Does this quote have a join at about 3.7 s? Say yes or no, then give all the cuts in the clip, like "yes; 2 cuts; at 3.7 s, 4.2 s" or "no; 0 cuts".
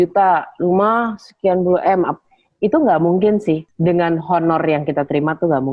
yes; 1 cut; at 3.7 s